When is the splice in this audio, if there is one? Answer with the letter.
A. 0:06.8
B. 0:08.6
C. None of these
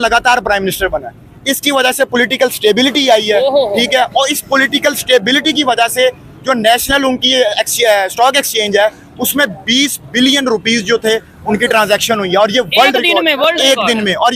C